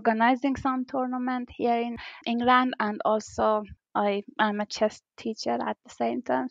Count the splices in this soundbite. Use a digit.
2